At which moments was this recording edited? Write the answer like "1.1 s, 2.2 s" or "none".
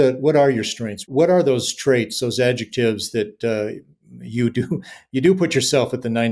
1.0 s

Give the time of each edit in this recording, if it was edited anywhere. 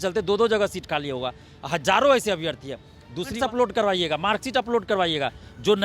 3.3 s

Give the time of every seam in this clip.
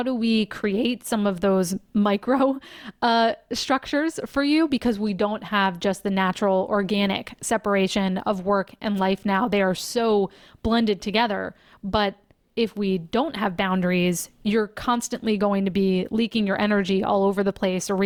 none

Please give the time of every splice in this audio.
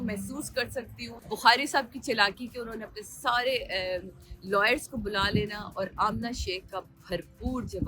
1.2 s

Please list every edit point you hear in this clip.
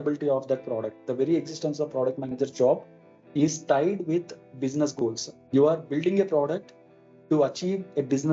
0.9 s, 5.3 s

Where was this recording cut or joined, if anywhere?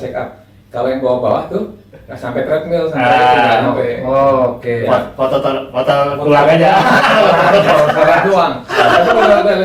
none

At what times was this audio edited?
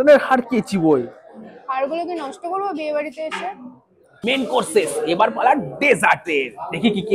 none

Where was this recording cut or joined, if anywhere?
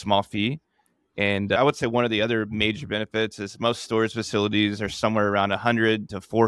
1.6 s

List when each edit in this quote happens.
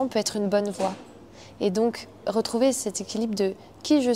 none

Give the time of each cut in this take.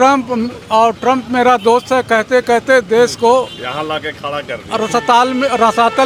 none

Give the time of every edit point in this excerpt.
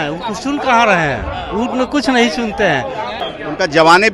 3.2 s

